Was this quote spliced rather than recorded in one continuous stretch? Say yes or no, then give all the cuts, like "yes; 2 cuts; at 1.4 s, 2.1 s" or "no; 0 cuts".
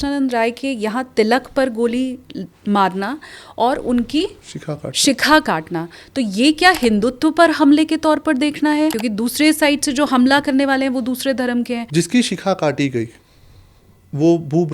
yes; 2 cuts; at 9.0 s, 11.8 s